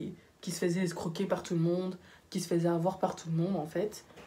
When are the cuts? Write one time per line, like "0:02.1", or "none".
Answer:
none